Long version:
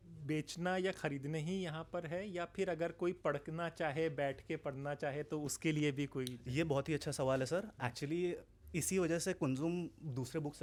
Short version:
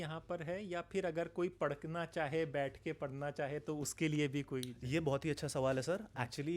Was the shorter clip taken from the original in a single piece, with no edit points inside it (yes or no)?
yes